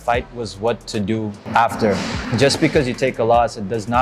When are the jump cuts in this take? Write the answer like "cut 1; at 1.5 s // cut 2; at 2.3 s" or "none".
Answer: cut 1; at 2.2 s